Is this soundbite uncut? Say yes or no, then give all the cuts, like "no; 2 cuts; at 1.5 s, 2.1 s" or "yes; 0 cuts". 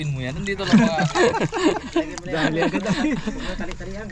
yes; 0 cuts